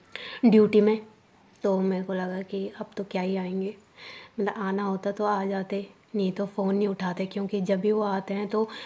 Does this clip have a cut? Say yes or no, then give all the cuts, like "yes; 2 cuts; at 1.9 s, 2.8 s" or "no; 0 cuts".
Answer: no; 0 cuts